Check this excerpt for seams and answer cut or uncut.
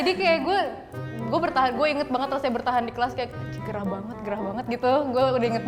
uncut